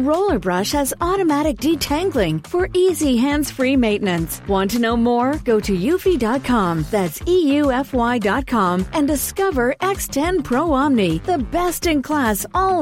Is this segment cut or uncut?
uncut